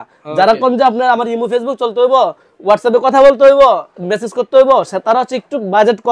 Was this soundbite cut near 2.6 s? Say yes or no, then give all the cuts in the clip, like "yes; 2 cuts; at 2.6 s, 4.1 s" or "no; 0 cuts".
no; 0 cuts